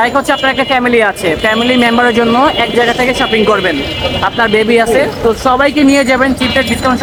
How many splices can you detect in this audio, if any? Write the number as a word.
zero